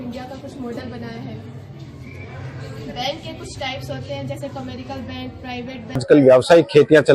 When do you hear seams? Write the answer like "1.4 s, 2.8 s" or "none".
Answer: 6.0 s